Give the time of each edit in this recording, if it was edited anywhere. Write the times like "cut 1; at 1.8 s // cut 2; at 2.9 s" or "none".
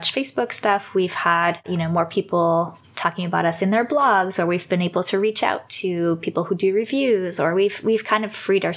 cut 1; at 1.7 s

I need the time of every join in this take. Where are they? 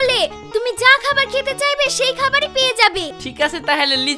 cut 1; at 3.1 s

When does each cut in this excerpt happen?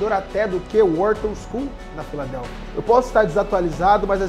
cut 1; at 2.7 s

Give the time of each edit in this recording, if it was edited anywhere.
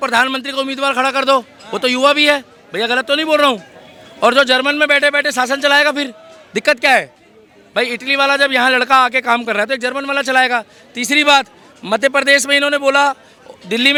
none

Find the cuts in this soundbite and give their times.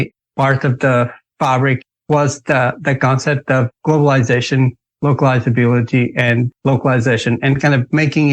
cut 1; at 1.8 s

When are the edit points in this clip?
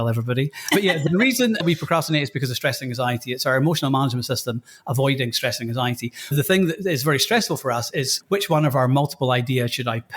cut 1; at 1.6 s

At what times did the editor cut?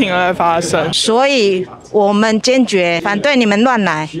cut 1; at 0.9 s // cut 2; at 3.0 s

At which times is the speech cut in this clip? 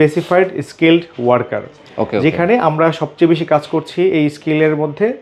none

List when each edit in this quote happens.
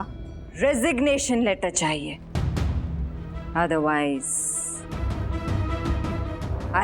cut 1; at 3.4 s

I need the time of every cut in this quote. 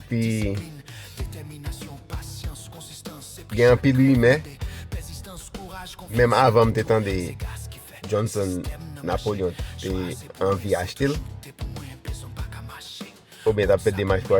none

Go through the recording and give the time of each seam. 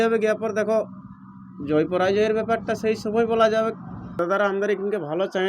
cut 1; at 4.2 s

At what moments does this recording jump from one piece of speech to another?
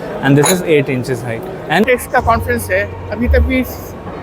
cut 1; at 1.8 s

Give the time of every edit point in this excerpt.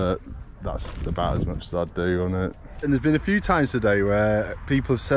cut 1; at 2.9 s

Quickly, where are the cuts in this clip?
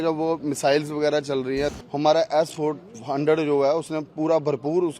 cut 1; at 1.7 s

